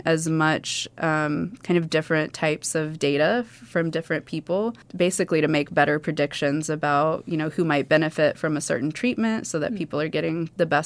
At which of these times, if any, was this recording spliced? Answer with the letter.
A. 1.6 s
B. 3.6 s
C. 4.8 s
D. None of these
C